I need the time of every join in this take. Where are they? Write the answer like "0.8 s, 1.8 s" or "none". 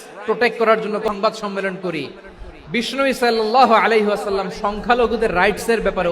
1.1 s

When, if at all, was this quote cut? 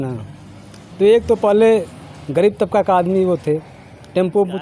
none

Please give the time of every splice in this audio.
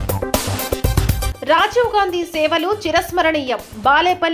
none

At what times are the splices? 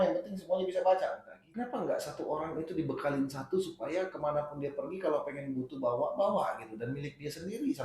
1.4 s

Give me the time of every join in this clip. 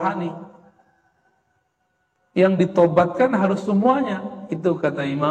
none

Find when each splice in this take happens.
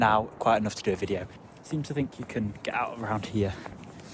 1.3 s

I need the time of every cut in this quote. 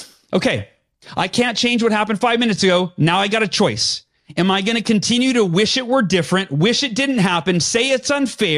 none

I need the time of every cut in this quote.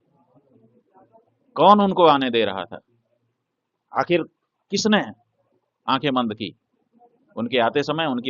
none

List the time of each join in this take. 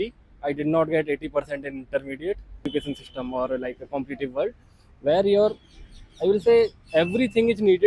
2.7 s

